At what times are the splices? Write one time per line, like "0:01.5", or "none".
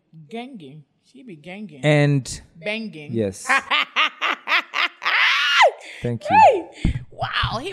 none